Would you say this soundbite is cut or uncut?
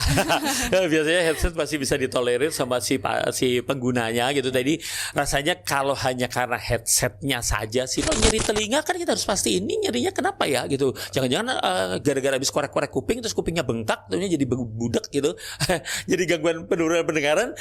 cut